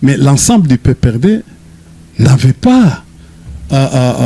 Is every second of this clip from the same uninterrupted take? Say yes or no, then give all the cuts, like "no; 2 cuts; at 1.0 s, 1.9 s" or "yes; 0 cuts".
yes; 0 cuts